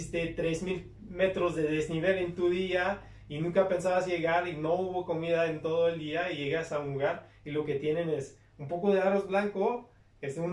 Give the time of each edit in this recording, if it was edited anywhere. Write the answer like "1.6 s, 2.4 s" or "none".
none